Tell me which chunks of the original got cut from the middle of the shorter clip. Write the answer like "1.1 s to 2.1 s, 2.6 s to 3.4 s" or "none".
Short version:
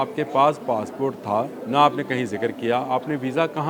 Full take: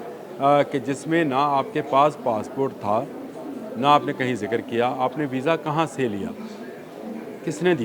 3.2 s to 3.7 s